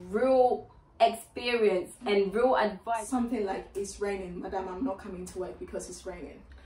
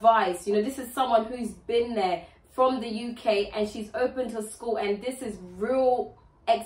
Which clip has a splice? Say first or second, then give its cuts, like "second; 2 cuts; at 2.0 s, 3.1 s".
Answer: first; 1 cut; at 2.8 s